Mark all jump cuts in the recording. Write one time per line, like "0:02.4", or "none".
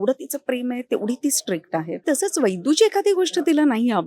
0:02.0